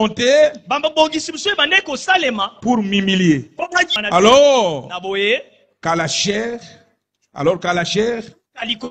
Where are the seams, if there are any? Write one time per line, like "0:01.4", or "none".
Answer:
0:03.9